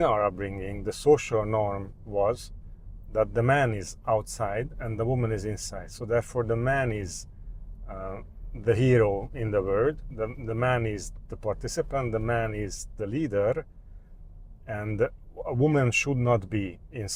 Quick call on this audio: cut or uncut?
uncut